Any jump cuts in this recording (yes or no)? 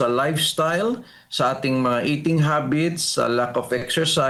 no